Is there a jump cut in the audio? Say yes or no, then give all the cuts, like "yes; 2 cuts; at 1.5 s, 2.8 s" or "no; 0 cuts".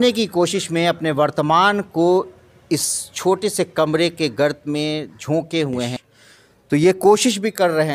yes; 1 cut; at 5.9 s